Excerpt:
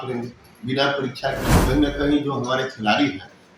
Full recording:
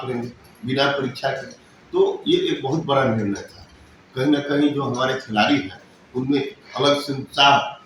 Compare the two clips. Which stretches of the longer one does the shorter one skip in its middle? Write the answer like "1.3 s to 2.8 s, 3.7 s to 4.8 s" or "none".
1.5 s to 4.0 s

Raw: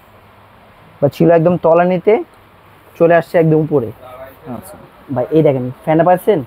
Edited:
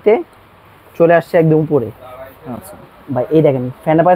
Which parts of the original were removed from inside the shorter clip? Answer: none

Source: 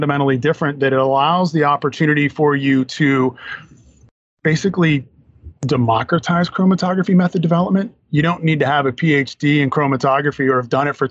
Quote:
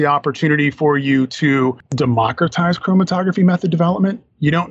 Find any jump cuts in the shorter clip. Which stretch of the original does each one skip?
3.4 s to 5.6 s

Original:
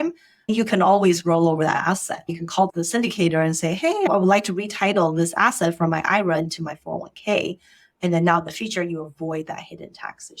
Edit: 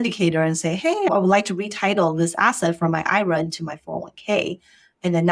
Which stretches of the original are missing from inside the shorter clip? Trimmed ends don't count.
none

